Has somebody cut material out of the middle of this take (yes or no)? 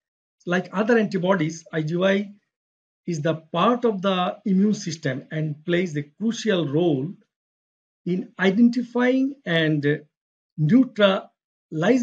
no